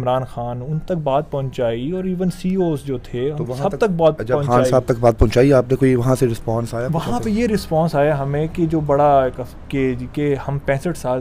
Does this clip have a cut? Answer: no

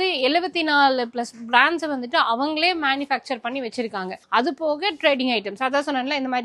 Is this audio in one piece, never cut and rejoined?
yes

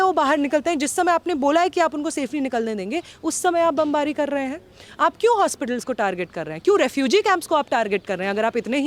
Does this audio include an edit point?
no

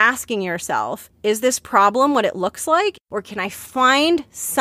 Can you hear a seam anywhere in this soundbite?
yes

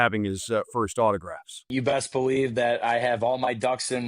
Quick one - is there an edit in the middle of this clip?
yes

